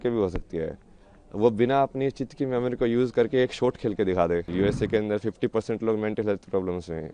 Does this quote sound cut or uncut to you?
cut